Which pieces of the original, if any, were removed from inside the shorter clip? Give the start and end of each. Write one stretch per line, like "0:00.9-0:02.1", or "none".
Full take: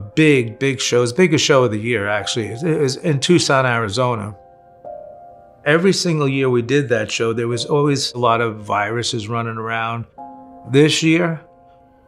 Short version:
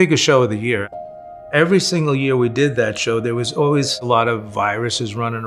0:02.2-0:05.1